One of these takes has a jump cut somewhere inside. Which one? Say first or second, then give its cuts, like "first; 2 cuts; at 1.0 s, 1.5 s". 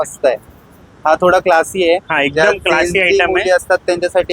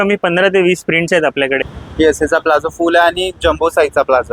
second; 1 cut; at 1.6 s